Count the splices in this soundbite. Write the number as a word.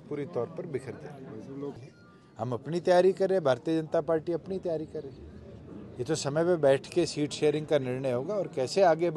one